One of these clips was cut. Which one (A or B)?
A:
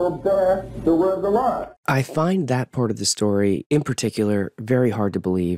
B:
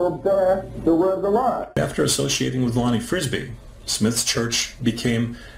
B